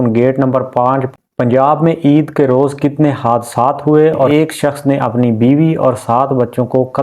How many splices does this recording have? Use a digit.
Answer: 2